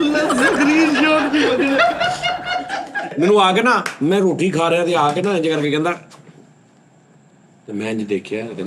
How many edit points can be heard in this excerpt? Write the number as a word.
one